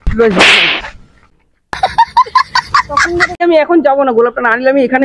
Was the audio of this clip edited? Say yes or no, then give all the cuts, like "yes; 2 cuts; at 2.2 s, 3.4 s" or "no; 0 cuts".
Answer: yes; 1 cut; at 3.4 s